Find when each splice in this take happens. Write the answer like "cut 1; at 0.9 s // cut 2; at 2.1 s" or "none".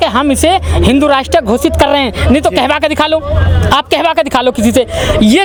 none